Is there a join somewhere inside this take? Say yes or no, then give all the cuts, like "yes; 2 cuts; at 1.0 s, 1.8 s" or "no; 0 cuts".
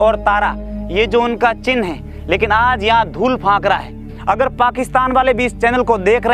yes; 1 cut; at 4.1 s